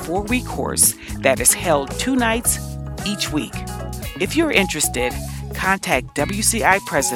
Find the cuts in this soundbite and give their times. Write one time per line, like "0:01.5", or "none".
0:04.0